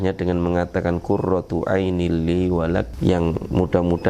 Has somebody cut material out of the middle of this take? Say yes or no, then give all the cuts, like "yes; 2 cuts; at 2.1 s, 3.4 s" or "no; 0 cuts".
yes; 1 cut; at 2.9 s